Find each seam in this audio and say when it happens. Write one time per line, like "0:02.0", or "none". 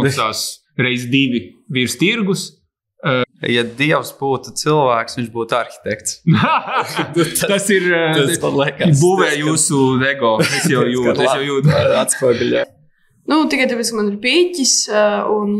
0:03.2
0:12.7